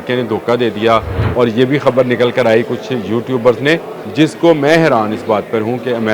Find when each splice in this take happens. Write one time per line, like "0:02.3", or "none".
0:01.2
0:04.0